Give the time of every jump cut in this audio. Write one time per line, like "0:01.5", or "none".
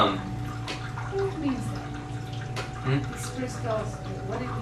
0:03.2